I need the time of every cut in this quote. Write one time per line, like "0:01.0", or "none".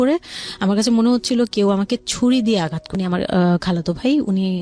0:02.8